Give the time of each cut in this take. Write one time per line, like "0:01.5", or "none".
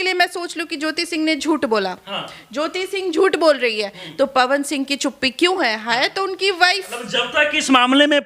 none

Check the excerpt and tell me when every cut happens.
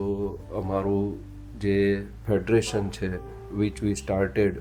none

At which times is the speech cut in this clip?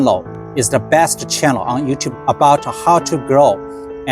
0:02.1

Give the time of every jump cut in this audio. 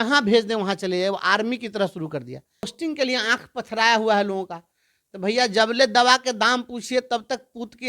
0:02.7

